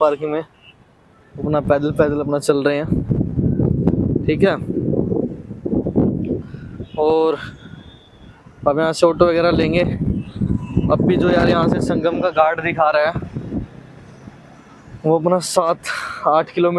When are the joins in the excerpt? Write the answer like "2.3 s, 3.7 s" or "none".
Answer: none